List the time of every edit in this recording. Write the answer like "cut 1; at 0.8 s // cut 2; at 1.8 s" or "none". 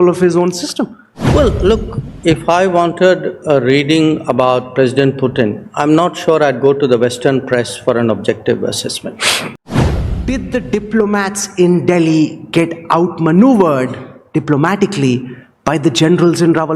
cut 1; at 10.1 s